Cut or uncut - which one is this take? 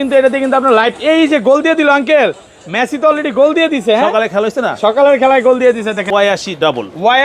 cut